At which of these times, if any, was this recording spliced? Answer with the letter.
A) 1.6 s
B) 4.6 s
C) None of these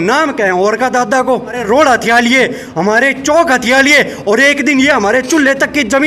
A